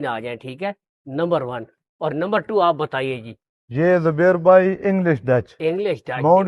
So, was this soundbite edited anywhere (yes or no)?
no